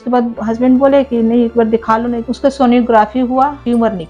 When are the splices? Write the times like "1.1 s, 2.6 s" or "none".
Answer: 2.2 s